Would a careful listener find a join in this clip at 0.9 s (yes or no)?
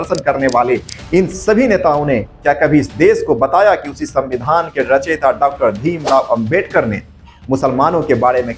yes